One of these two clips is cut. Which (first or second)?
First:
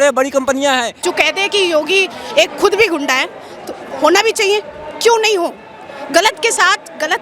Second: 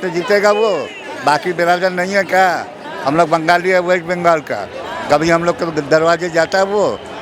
first